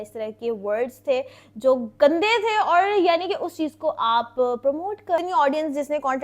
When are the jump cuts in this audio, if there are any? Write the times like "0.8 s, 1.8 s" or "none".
5.2 s